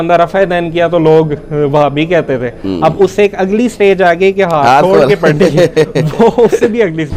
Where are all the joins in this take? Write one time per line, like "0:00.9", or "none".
none